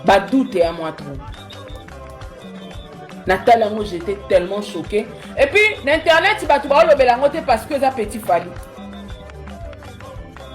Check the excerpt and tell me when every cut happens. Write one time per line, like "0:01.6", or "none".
0:00.9
0:03.2